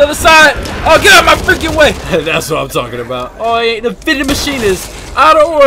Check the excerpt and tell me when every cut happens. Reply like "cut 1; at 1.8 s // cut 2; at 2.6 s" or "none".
cut 1; at 2.0 s // cut 2; at 3.3 s